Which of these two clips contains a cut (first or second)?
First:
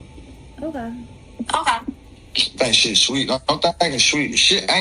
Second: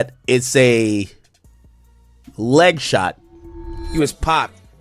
second